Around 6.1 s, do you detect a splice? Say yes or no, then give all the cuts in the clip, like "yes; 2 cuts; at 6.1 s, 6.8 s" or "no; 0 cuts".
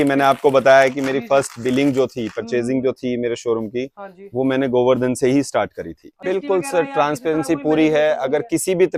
yes; 1 cut; at 6.1 s